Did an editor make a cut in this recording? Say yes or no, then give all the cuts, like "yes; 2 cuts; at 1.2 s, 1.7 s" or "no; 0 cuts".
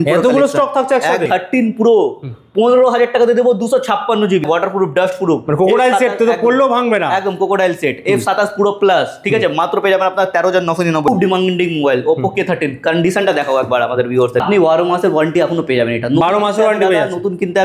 yes; 4 cuts; at 1.2 s, 4.4 s, 11.1 s, 14.4 s